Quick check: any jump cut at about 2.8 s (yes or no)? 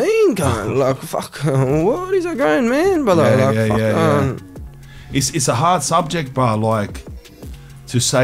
no